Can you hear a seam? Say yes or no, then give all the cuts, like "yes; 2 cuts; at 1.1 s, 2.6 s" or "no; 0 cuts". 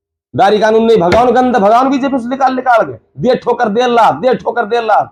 no; 0 cuts